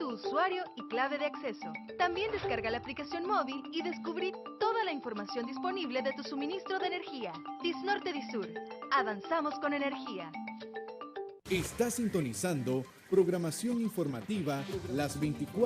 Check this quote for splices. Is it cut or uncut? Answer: cut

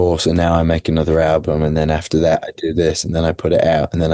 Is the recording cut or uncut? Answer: uncut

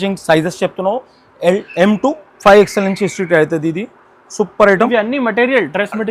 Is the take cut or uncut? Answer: uncut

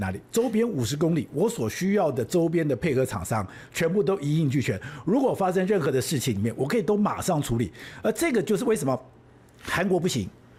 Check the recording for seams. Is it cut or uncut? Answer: uncut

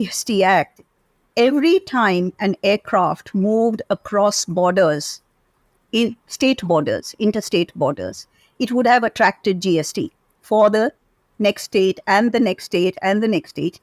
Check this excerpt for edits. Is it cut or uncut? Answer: uncut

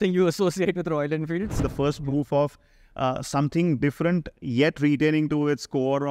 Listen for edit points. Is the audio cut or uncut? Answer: cut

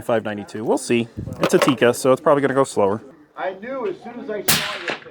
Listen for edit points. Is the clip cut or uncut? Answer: cut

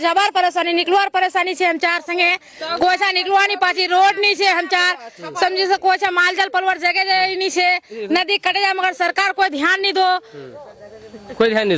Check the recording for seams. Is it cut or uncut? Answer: uncut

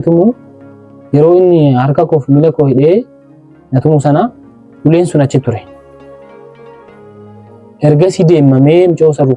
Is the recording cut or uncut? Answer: uncut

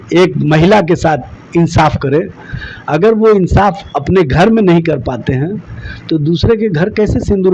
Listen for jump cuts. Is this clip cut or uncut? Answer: uncut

